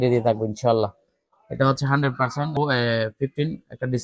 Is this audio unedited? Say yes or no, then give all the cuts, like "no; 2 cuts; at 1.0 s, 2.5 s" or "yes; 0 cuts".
no; 1 cut; at 2.5 s